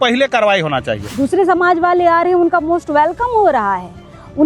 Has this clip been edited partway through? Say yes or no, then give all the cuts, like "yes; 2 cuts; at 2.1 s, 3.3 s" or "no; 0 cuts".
yes; 1 cut; at 1.0 s